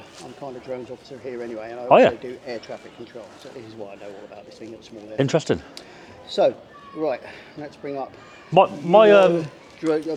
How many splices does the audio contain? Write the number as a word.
zero